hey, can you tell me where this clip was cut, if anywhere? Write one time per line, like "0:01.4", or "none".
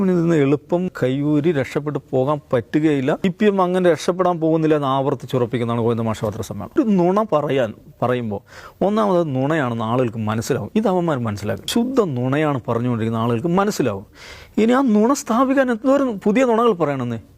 0:00.9
0:03.2
0:06.8
0:11.6